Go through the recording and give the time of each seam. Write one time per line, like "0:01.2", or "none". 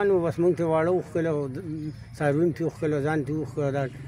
none